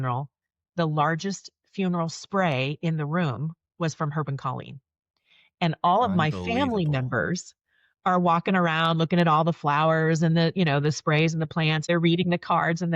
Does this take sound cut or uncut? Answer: cut